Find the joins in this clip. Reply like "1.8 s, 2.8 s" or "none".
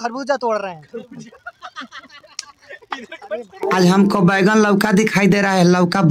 1.2 s, 3.6 s